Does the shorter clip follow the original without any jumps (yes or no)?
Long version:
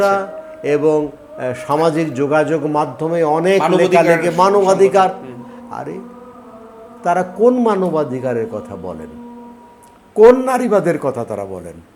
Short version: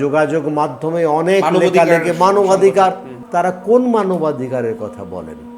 no